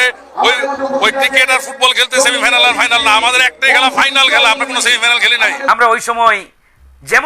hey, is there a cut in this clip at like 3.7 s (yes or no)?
no